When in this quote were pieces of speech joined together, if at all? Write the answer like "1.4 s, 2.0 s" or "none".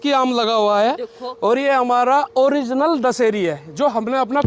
none